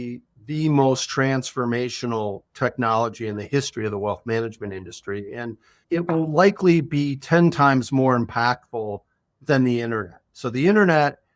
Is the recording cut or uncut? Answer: uncut